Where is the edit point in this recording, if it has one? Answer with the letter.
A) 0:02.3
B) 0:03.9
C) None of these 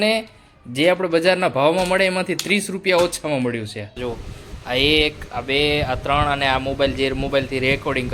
B